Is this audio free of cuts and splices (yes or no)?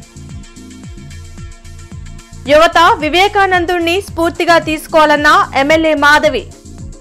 no